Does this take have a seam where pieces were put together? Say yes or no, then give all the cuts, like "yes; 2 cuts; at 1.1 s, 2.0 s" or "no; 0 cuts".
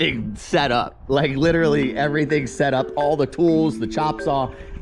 no; 0 cuts